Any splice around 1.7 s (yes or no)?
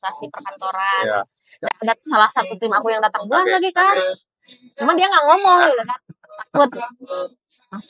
yes